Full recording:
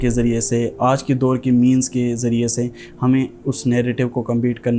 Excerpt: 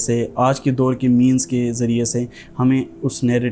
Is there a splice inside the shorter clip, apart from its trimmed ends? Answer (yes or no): no